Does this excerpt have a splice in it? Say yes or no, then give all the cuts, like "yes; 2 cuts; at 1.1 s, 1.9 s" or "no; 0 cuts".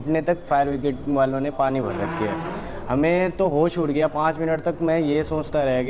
no; 0 cuts